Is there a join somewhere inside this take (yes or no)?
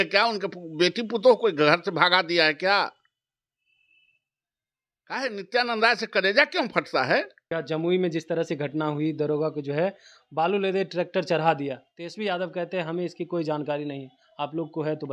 yes